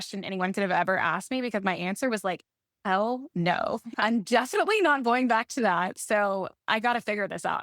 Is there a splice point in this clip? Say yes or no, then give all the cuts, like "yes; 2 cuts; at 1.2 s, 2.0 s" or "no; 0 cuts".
yes; 2 cuts; at 3.9 s, 6.5 s